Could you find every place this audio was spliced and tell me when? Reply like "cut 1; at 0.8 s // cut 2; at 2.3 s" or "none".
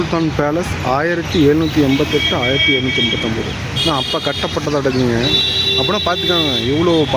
none